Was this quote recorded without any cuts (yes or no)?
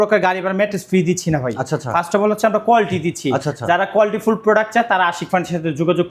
yes